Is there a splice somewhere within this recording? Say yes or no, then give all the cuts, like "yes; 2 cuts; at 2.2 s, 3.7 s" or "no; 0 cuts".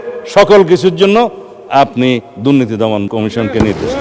yes; 1 cut; at 3.1 s